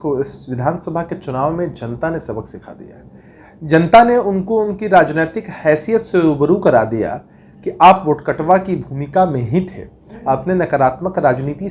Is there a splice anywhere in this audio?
no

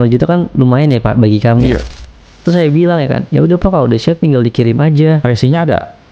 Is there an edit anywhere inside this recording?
yes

